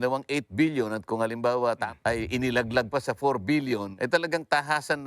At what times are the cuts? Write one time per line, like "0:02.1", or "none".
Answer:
0:01.9
0:03.9